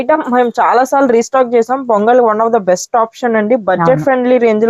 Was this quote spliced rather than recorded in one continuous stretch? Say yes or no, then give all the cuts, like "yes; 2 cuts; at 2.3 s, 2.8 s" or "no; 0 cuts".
no; 0 cuts